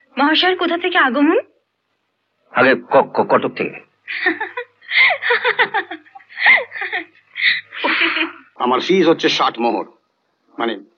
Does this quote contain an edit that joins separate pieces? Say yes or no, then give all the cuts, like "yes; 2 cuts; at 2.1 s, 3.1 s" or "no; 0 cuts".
yes; 1 cut; at 8.4 s